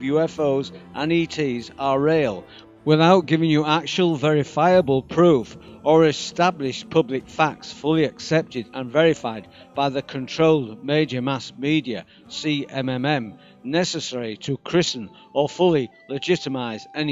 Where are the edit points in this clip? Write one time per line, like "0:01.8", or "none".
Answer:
0:04.9